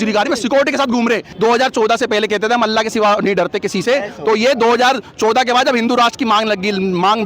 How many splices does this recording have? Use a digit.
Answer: 1